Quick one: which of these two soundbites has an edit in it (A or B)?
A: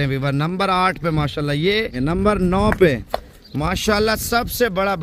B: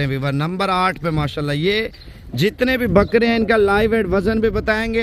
A